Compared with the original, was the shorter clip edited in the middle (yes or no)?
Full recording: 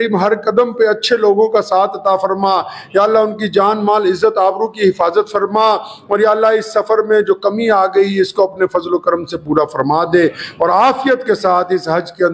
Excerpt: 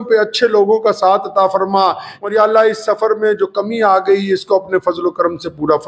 yes